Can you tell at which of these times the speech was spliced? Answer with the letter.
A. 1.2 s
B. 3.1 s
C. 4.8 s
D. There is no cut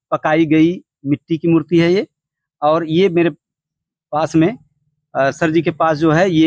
D